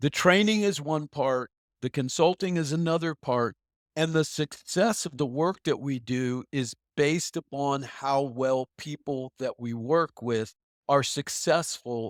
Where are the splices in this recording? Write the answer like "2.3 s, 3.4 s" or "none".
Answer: none